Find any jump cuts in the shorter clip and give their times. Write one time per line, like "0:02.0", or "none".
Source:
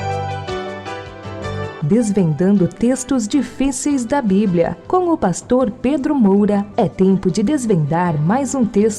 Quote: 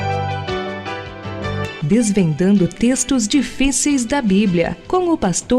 none